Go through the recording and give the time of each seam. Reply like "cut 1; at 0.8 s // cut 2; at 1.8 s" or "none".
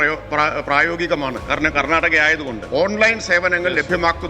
cut 1; at 2.6 s